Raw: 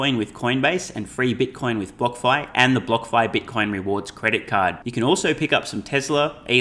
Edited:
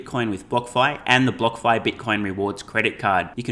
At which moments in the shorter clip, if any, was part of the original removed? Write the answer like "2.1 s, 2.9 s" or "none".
none